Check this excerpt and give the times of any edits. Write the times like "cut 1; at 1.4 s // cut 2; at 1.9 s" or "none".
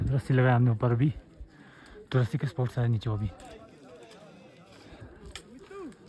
none